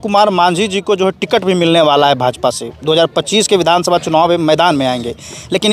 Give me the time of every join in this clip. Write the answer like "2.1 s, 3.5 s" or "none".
none

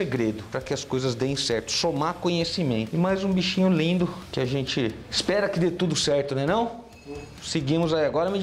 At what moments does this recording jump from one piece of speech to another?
none

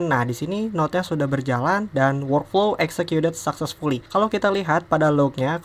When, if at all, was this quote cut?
4.0 s

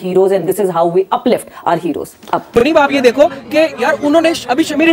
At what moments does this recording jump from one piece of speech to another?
2.4 s

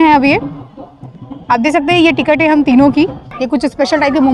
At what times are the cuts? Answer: 3.3 s

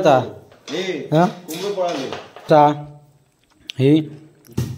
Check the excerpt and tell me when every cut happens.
2.4 s

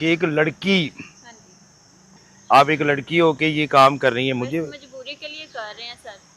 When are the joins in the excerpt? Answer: 2.1 s

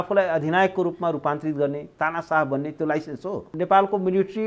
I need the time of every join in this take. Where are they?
3.5 s

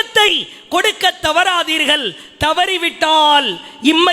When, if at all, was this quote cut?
none

